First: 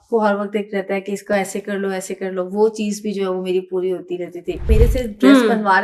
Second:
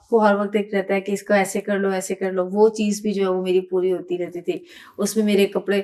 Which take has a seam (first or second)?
first